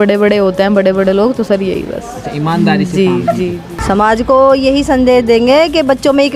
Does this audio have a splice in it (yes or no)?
yes